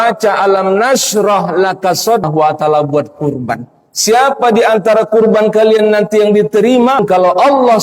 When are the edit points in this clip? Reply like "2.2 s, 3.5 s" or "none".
2.2 s, 7.0 s